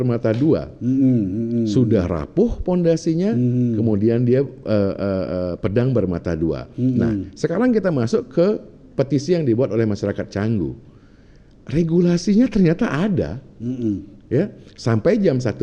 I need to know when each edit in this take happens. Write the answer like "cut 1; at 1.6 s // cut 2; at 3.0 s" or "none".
none

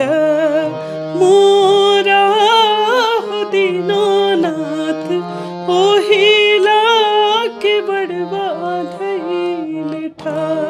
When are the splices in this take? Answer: none

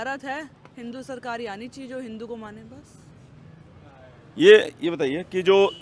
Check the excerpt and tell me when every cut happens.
none

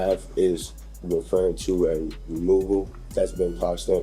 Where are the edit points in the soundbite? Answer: cut 1; at 3.0 s

